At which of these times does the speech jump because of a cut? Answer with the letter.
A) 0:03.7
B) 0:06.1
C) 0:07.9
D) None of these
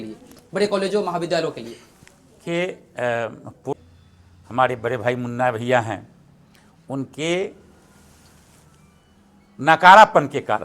A